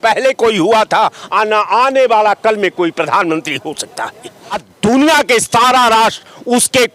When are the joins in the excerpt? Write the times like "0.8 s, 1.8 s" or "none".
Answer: 4.7 s